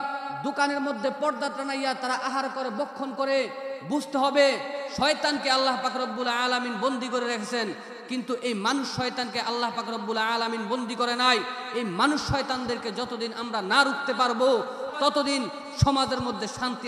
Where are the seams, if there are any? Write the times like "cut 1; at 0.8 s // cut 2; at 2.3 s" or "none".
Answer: cut 1; at 14.8 s